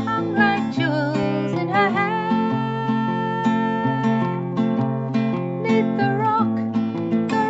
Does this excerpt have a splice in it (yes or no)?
no